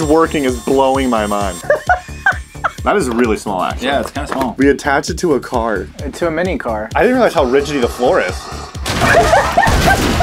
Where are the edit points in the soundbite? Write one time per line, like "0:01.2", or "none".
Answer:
0:01.6
0:02.8
0:04.5
0:06.9